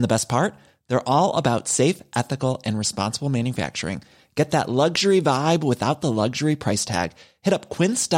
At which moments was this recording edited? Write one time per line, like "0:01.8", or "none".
none